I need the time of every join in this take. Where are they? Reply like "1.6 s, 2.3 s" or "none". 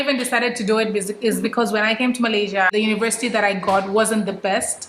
2.7 s